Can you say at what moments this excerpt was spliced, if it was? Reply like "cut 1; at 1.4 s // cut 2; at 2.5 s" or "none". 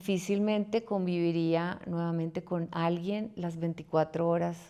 none